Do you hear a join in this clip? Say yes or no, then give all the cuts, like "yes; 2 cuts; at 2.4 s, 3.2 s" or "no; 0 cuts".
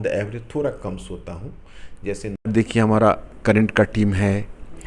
yes; 1 cut; at 2.4 s